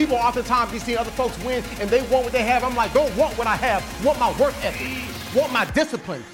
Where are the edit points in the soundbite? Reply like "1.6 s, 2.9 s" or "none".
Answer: none